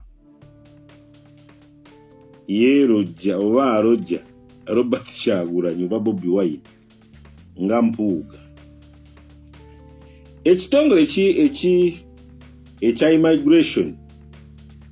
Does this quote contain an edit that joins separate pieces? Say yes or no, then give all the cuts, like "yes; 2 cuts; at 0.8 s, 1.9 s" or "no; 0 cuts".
no; 0 cuts